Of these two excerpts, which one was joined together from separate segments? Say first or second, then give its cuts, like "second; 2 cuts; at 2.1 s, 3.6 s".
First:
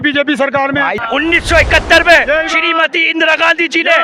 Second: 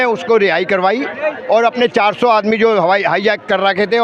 first; 1 cut; at 1.0 s